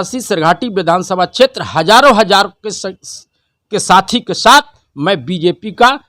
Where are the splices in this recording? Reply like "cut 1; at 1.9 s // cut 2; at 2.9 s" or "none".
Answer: none